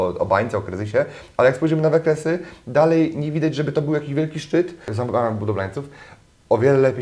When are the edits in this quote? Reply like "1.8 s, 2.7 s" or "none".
4.9 s